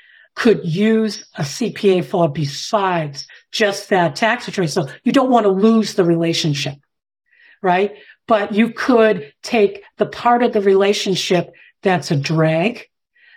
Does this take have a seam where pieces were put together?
no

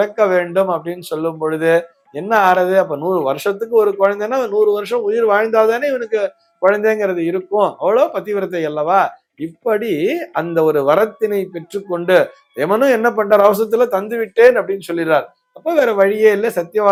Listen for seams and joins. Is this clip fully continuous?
yes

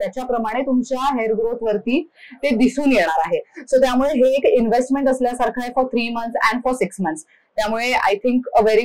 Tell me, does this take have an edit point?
no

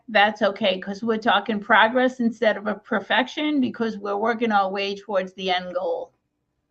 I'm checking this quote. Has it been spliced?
no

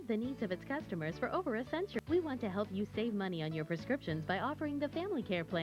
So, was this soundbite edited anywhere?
yes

